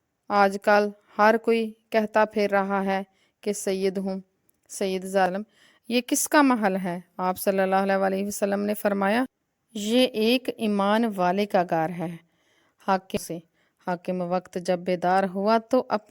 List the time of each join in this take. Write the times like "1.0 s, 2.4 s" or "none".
5.3 s, 13.2 s